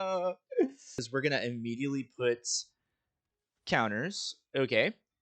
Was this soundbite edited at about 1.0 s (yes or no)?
yes